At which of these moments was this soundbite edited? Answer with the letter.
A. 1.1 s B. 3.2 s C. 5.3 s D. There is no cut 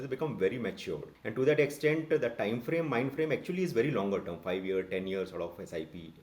A